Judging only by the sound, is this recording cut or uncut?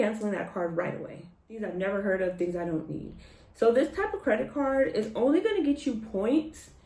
cut